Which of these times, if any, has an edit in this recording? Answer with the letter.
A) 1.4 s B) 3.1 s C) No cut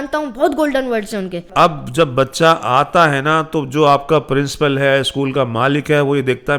A